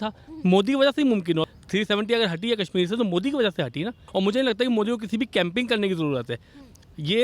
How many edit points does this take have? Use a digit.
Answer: 2